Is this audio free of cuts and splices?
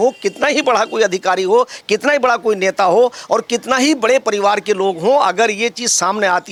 yes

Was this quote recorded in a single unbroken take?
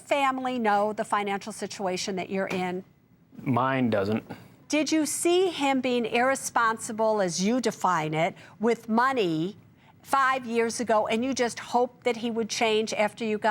no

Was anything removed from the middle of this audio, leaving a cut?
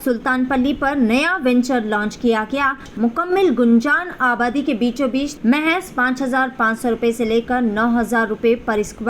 yes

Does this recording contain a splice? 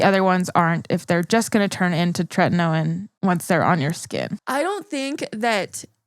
yes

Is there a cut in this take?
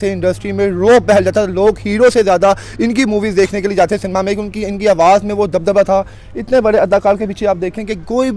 no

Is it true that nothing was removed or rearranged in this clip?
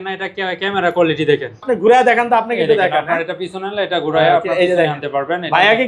no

